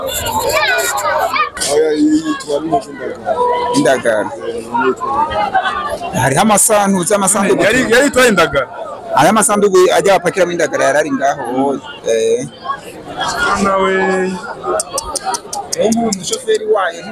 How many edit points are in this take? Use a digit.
1